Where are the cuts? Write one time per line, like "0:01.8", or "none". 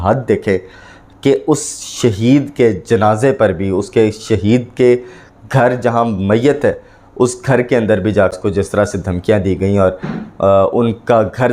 0:08.3